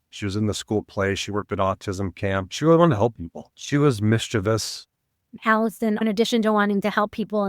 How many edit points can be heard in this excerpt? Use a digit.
2